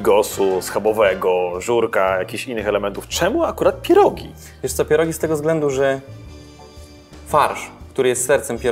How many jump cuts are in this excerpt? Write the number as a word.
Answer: zero